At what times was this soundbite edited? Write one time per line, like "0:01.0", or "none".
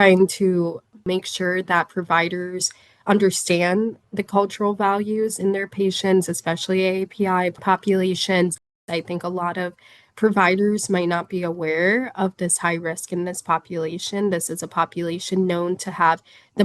0:01.1
0:07.6
0:08.8